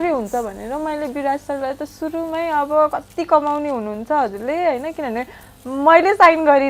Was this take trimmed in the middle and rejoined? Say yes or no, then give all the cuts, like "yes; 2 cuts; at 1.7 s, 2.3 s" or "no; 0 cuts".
no; 0 cuts